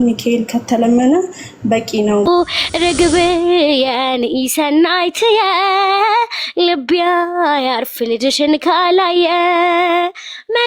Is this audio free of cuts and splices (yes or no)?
no